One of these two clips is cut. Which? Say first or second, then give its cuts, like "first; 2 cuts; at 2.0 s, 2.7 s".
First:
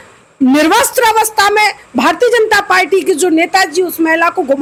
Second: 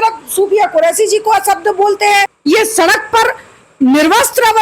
second; 1 cut; at 2.3 s